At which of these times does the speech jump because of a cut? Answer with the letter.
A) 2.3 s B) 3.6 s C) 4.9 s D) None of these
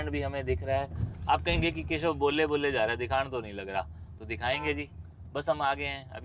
D